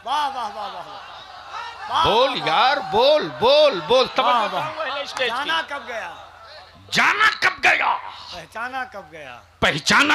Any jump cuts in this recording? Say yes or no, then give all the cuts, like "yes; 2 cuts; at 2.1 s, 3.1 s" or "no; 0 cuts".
no; 0 cuts